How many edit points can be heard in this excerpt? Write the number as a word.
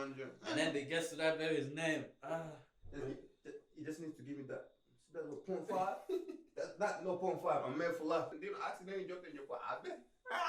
one